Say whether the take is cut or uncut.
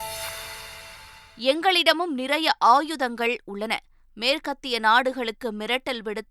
cut